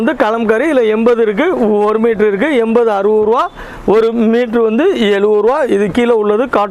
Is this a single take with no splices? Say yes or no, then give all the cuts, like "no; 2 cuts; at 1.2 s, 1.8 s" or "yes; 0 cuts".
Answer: yes; 0 cuts